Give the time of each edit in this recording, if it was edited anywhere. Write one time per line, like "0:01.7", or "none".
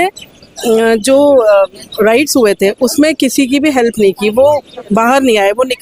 none